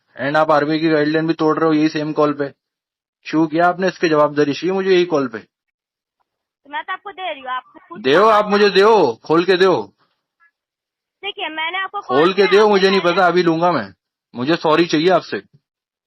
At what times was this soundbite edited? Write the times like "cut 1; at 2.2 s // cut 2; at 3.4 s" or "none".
none